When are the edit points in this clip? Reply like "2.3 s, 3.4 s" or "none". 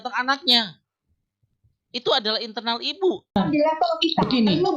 3.4 s